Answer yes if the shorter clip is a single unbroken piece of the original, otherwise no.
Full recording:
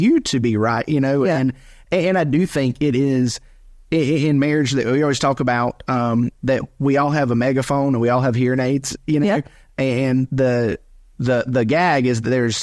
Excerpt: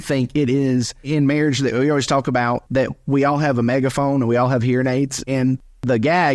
no